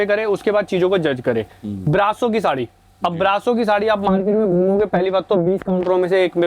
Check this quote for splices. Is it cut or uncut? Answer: uncut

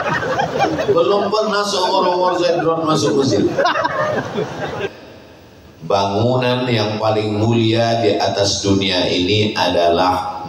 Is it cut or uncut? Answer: cut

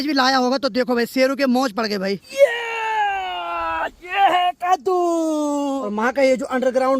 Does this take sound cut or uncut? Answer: cut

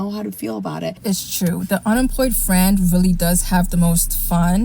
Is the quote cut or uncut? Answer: cut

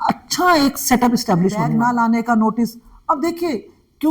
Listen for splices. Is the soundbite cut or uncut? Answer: cut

